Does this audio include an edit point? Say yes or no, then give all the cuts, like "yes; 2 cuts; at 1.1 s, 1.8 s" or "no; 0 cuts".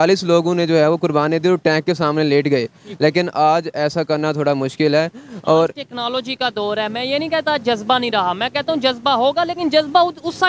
no; 0 cuts